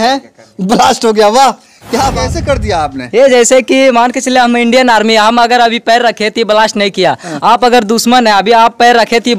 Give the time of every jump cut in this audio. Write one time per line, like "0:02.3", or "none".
0:02.2